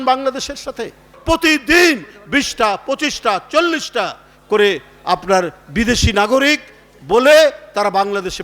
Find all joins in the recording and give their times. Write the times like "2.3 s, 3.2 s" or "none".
1.1 s